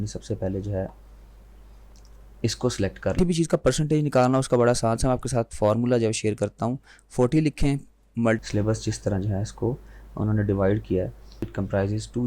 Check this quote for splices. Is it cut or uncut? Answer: cut